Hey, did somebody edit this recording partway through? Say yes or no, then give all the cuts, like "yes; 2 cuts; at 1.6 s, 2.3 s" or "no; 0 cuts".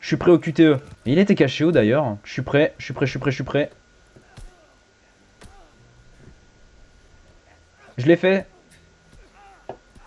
yes; 1 cut; at 0.9 s